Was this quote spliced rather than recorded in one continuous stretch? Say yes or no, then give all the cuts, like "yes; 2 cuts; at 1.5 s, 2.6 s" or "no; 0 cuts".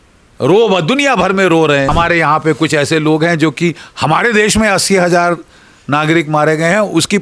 yes; 1 cut; at 1.9 s